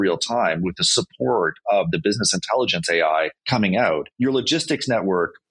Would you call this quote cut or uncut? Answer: cut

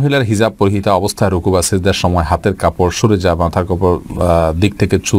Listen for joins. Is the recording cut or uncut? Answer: uncut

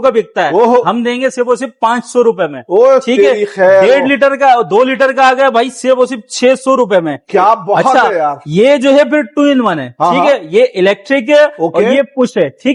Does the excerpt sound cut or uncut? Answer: uncut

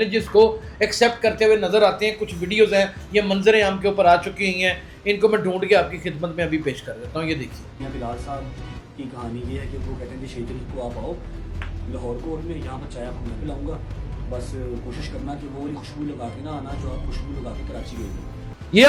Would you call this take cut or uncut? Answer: uncut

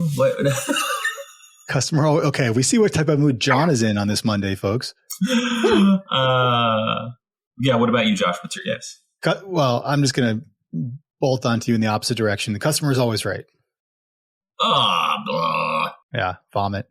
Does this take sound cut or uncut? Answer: cut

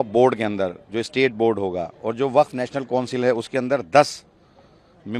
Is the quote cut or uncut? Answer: uncut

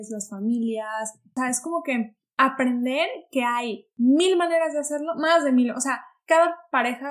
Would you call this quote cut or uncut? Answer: cut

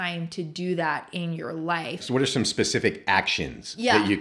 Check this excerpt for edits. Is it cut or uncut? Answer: cut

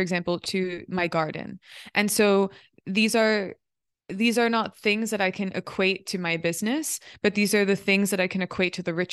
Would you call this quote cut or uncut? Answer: uncut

